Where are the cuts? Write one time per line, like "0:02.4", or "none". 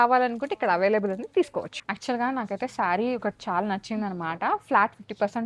0:01.8